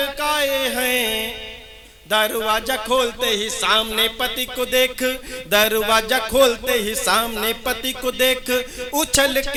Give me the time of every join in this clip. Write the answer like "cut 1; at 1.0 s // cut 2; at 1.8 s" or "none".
none